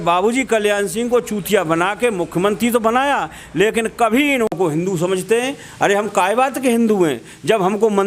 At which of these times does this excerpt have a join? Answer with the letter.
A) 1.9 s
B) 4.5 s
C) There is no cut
B